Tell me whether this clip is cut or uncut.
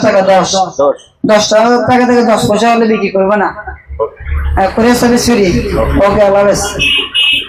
uncut